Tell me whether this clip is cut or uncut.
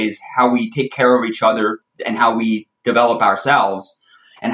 cut